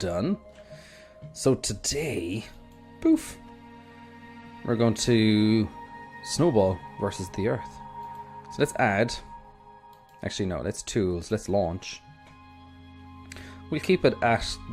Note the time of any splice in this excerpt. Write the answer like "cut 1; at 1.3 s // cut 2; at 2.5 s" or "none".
cut 1; at 7.3 s